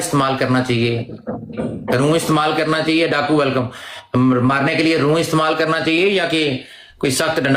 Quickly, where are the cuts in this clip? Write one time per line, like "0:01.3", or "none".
none